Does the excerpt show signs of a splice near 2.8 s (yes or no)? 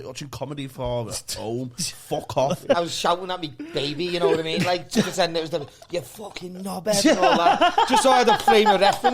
yes